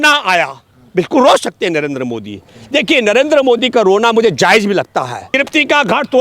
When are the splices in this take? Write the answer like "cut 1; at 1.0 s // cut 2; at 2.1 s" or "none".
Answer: cut 1; at 5.2 s